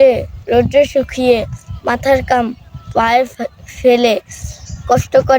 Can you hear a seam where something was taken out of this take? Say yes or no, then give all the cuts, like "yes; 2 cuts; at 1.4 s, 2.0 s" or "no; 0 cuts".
no; 0 cuts